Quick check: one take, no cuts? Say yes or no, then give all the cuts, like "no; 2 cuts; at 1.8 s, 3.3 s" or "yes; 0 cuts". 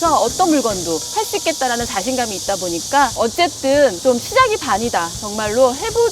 no; 1 cut; at 3.1 s